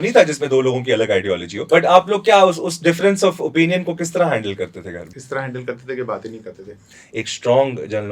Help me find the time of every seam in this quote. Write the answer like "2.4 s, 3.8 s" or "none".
1.5 s, 5.1 s, 7.0 s